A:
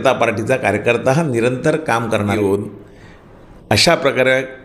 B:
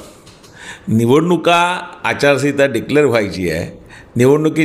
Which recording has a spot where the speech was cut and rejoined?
A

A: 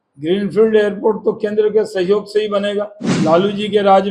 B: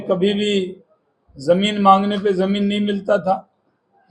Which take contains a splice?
A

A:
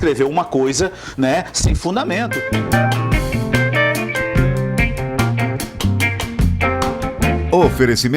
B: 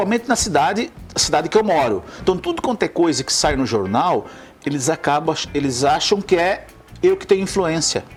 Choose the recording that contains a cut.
A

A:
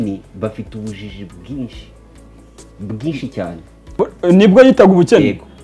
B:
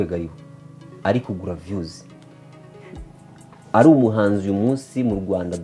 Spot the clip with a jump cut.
A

